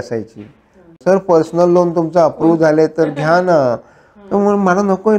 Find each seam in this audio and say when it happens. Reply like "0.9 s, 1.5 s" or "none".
1.0 s